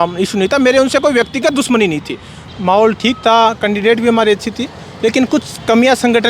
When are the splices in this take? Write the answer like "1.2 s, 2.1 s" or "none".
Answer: 2.4 s